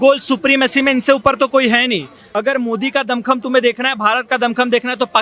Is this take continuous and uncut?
no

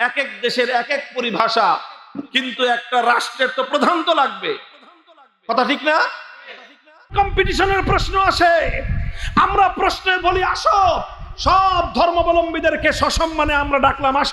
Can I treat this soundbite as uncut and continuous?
no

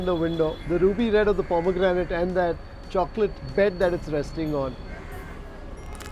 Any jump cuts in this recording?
no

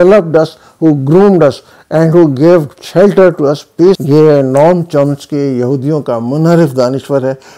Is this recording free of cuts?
no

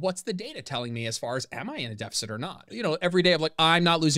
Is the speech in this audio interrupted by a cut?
yes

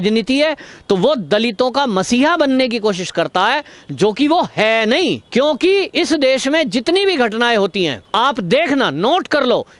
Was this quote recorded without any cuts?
no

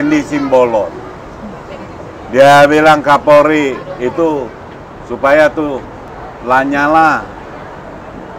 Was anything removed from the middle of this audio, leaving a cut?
no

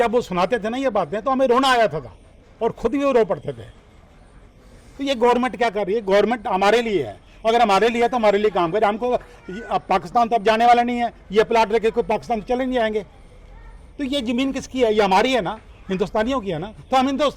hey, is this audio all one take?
yes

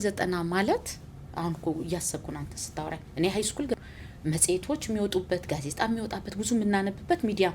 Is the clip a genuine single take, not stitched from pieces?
no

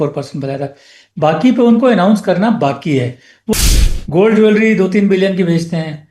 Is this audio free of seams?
no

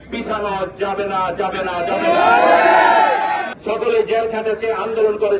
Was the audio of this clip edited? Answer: yes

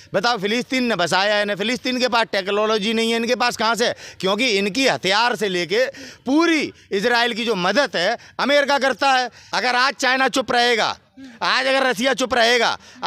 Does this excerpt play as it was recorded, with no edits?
no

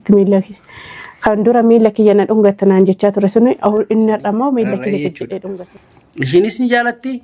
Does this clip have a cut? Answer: yes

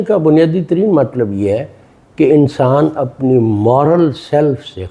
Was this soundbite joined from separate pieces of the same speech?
no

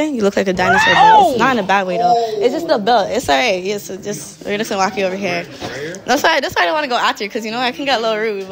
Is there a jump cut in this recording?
no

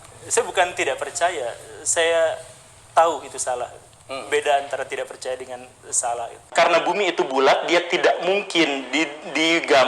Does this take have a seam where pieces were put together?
yes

